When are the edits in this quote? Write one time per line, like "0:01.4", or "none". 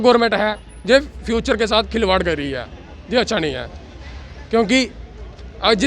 none